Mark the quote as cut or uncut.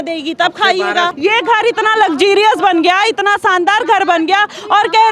cut